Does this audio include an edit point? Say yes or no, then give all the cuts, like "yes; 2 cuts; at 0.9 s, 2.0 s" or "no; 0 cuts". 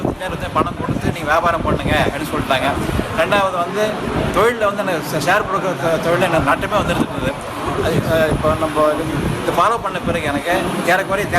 yes; 1 cut; at 9.2 s